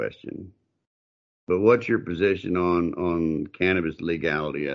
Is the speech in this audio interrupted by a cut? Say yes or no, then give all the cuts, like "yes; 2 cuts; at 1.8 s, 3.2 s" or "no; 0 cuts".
no; 0 cuts